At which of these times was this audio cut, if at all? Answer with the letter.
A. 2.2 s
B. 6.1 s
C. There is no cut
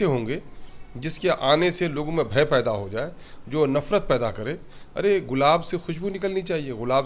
C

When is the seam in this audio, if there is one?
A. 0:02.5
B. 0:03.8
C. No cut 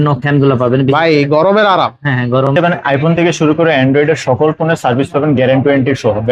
A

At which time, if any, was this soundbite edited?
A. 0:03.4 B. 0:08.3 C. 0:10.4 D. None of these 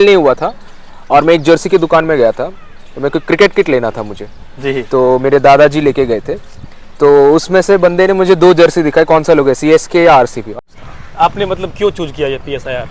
C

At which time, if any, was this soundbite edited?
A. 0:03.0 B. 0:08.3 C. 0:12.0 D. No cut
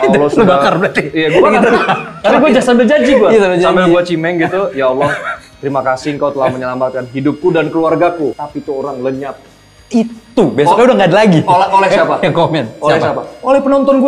B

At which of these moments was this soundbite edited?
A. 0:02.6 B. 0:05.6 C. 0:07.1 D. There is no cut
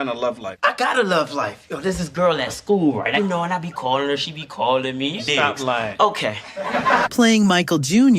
D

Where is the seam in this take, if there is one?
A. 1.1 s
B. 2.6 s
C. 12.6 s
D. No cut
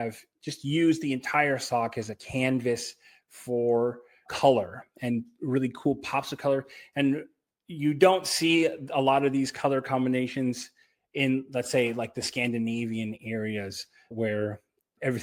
D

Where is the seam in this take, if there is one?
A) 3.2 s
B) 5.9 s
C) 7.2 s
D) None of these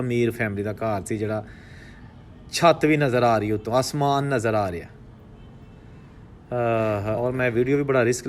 C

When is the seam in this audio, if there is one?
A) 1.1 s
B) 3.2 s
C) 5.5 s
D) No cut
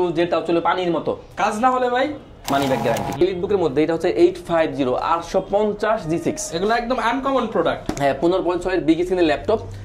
B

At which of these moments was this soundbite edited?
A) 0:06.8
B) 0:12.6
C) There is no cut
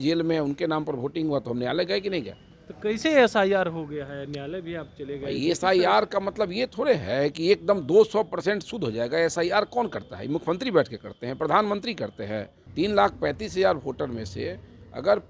B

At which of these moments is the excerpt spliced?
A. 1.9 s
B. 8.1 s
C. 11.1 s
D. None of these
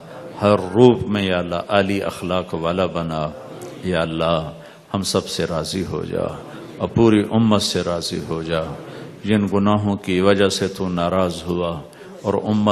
B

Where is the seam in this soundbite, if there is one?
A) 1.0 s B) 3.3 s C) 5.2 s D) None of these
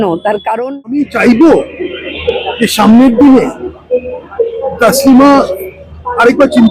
A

